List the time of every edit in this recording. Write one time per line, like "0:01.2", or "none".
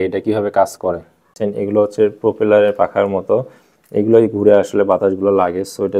0:01.3